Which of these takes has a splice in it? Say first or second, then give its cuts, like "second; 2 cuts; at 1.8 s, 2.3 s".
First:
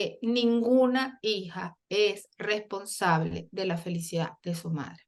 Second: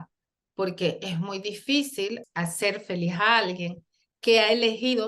second; 1 cut; at 2.2 s